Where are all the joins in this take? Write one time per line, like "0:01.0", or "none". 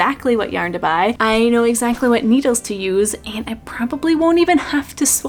none